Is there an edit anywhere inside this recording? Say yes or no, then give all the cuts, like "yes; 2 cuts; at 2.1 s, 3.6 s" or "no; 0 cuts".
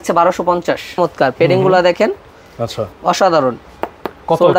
yes; 1 cut; at 1.0 s